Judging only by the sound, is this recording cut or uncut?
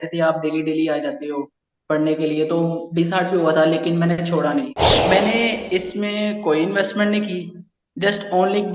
cut